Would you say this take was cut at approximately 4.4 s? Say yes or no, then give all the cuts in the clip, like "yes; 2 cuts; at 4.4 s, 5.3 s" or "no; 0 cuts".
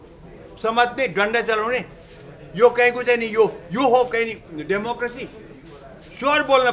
no; 0 cuts